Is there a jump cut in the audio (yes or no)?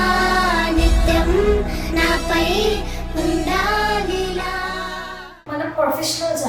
yes